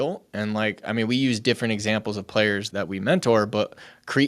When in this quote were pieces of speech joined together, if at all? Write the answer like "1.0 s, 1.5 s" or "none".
2.7 s